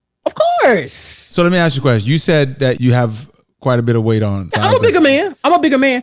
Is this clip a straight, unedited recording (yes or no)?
no